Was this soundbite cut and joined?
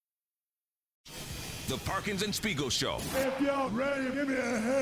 yes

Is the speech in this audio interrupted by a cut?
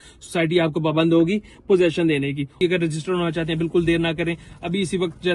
yes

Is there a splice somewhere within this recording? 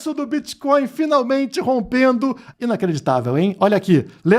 yes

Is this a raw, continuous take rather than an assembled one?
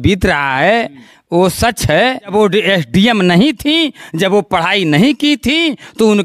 no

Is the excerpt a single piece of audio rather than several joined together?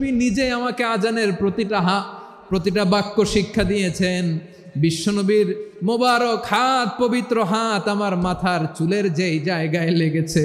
yes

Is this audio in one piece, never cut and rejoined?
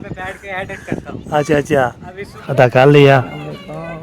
no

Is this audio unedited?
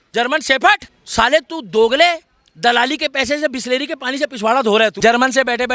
no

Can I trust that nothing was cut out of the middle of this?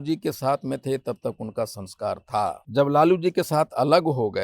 no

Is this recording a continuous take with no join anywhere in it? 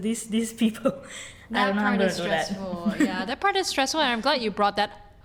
yes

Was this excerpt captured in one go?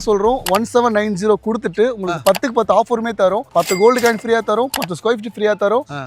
yes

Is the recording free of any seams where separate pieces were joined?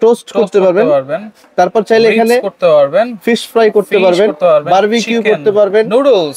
yes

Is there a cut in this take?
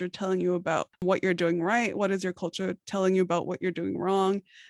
yes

